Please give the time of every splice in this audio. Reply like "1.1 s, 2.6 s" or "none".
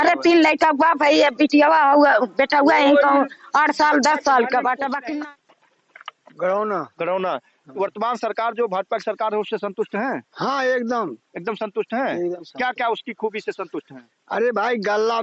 5.1 s